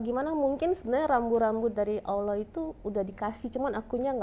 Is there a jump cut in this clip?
no; 0 cuts

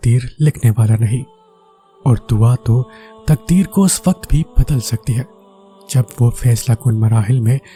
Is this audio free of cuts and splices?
yes; 0 cuts

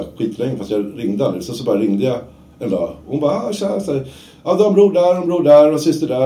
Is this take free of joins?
yes; 0 cuts

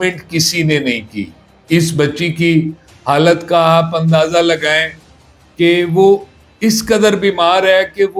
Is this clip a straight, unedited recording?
yes; 0 cuts

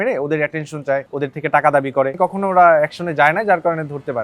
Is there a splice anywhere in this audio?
yes; 2 cuts; at 1.1 s, 2.1 s

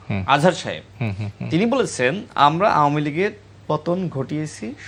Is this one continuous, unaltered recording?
yes; 0 cuts

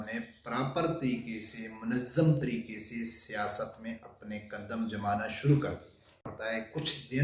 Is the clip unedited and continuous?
no; 1 cut; at 6.3 s

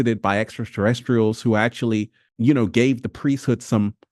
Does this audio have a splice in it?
no; 0 cuts

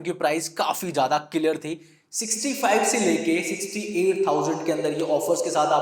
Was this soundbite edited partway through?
no; 0 cuts

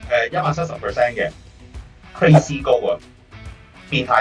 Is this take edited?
no; 0 cuts

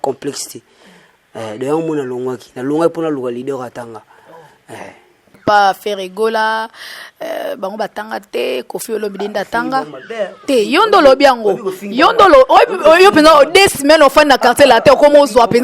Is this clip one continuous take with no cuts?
no; 1 cut; at 5.3 s

